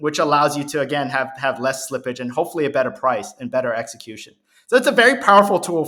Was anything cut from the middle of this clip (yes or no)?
no